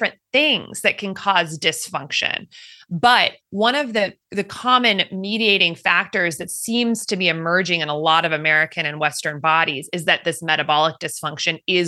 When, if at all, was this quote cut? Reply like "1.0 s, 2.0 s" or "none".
2.7 s